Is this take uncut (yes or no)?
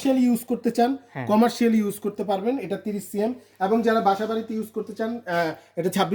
yes